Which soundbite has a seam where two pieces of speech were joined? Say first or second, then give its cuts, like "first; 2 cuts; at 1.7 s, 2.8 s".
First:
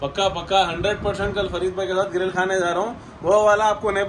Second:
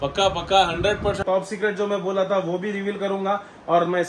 second; 1 cut; at 1.2 s